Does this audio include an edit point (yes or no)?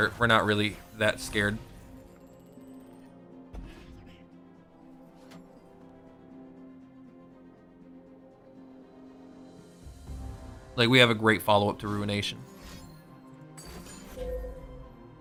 no